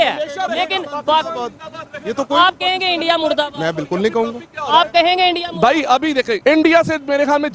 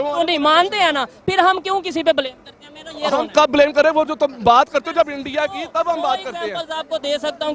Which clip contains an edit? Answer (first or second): first